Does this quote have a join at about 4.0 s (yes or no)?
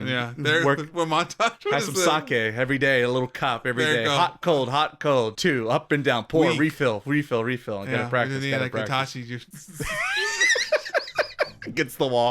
no